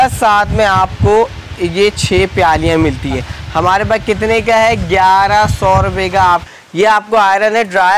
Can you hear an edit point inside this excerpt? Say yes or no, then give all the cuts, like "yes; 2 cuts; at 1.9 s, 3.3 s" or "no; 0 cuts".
yes; 2 cuts; at 3.3 s, 6.5 s